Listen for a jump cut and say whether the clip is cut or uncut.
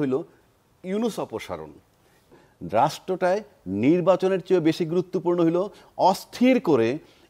cut